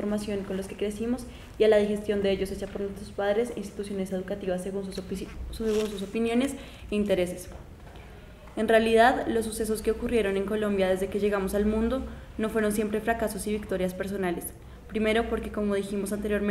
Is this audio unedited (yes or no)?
yes